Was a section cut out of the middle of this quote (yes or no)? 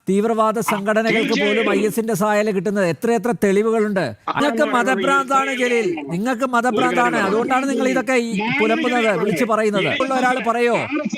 yes